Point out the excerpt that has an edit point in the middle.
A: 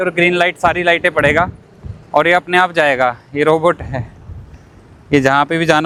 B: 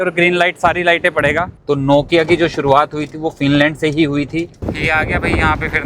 B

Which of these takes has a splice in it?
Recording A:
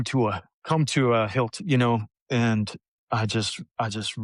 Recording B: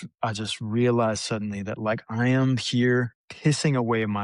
B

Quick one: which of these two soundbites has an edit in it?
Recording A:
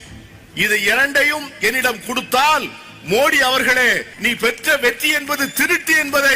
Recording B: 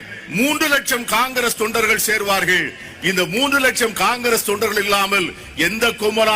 A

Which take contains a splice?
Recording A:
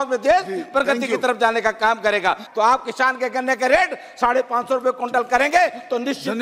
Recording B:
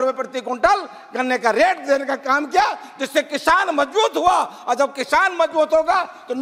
A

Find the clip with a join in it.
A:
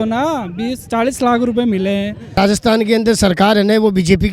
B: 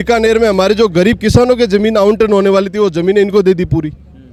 A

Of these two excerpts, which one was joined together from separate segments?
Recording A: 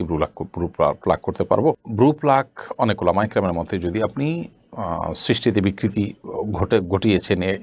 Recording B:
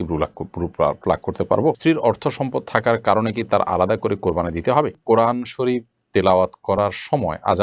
B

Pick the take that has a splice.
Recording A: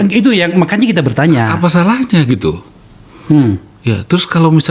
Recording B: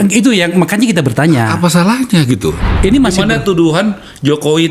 B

